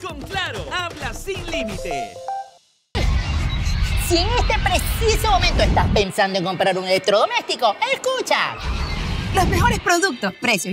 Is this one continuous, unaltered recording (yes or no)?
no